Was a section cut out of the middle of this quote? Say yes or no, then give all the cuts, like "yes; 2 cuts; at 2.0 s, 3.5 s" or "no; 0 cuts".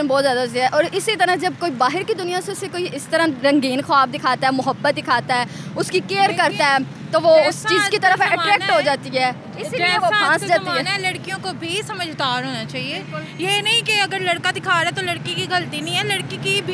no; 0 cuts